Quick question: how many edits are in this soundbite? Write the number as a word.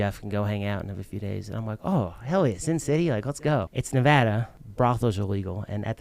two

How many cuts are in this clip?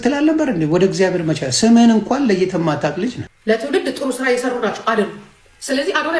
one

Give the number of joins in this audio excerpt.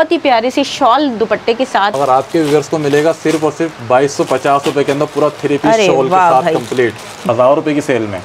two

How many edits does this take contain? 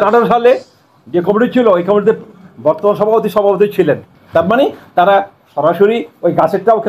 one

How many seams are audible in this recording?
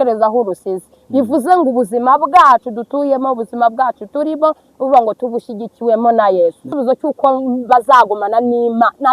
one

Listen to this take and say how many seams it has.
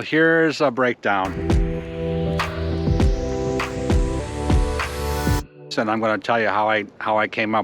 one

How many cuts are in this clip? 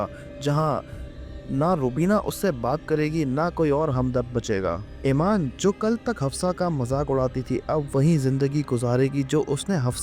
two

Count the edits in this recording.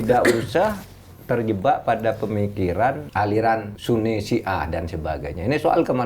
two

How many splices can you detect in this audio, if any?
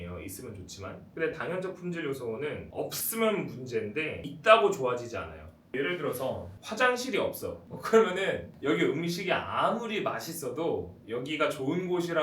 seven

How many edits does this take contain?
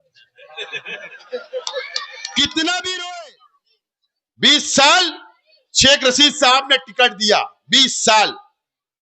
one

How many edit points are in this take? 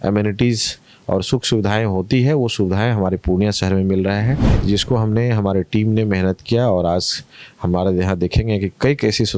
one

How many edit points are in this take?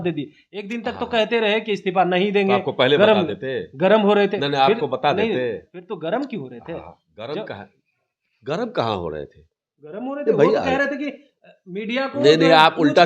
zero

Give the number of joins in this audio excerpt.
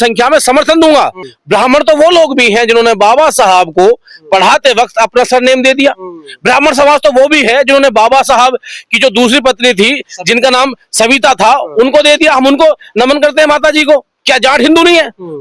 two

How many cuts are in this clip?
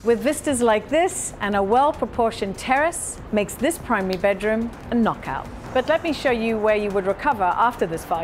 two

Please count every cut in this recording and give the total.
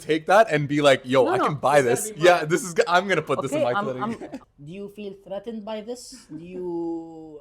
one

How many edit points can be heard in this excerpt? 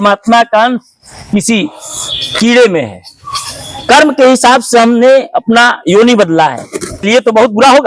one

